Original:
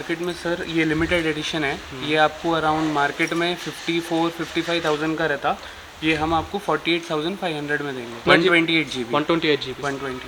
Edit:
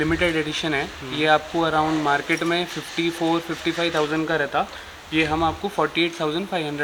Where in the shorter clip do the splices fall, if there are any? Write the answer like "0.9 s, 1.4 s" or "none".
none